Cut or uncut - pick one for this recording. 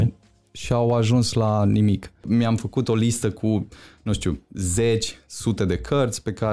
cut